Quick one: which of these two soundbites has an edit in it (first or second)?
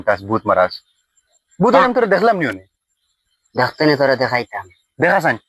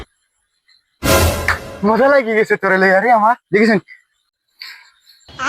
second